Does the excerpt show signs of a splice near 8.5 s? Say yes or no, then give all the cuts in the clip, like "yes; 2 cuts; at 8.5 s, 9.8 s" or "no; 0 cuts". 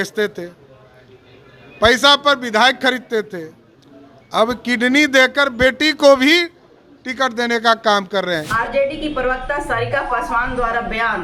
yes; 1 cut; at 8.5 s